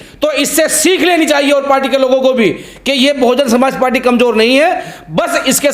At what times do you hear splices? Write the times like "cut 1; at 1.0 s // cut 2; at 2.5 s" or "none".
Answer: none